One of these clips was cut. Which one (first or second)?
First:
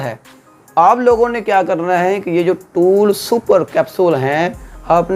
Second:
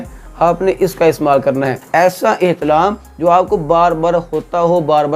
second